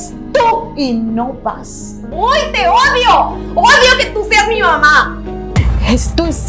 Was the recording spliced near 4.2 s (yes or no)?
no